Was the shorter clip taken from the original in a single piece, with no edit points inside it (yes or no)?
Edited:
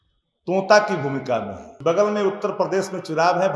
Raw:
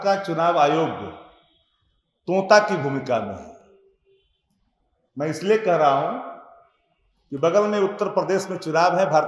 no